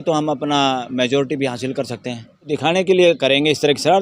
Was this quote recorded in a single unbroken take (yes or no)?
no